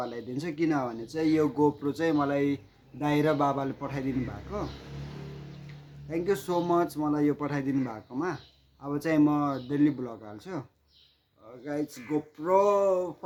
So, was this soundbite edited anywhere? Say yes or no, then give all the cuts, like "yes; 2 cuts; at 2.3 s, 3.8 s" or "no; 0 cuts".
no; 0 cuts